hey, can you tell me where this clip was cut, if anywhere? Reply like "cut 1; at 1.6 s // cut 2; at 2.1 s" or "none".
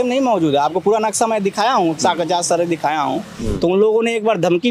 cut 1; at 3.3 s